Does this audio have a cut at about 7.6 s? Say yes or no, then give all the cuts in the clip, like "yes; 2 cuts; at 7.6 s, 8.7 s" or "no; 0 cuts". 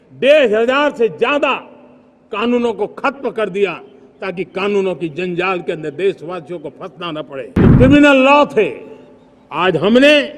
yes; 1 cut; at 7.6 s